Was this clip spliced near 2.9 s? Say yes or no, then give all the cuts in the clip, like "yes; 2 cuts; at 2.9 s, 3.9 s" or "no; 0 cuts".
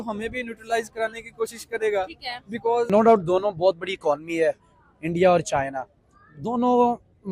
yes; 1 cut; at 2.9 s